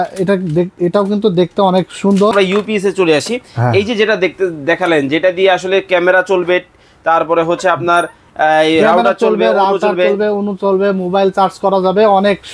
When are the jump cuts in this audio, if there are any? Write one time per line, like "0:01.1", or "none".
0:02.3

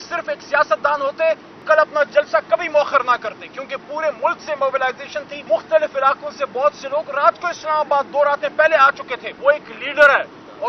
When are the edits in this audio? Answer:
0:01.5
0:05.3
0:09.3

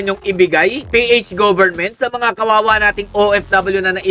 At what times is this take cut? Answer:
none

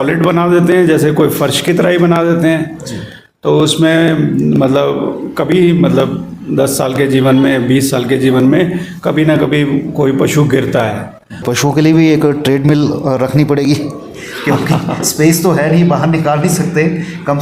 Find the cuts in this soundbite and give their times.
0:11.5

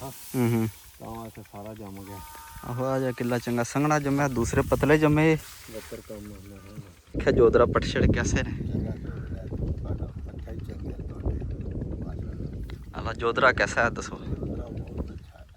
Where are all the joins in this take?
0:07.2

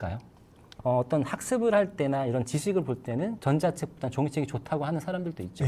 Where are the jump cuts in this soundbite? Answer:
none

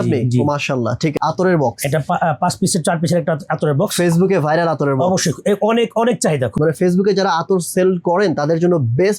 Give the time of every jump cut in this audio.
0:01.1
0:06.5

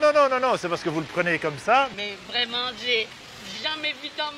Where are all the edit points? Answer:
0:01.9

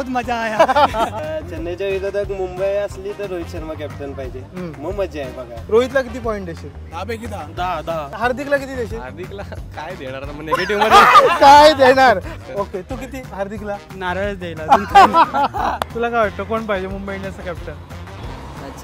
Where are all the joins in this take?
0:01.2
0:05.6
0:08.1
0:12.3
0:15.9

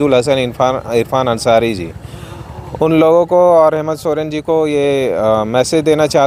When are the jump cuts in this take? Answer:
none

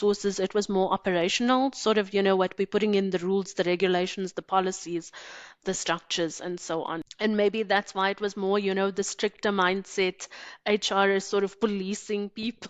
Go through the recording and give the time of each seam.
none

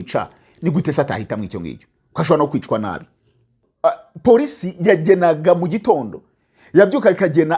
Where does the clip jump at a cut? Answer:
0:03.6

